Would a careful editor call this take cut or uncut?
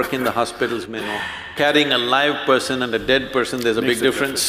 uncut